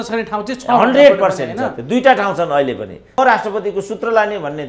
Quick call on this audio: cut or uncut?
cut